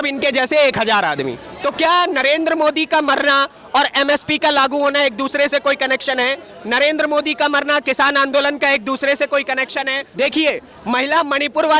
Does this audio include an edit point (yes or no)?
yes